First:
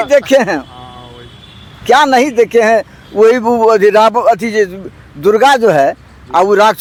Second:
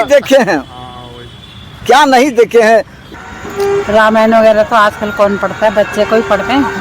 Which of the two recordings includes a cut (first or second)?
second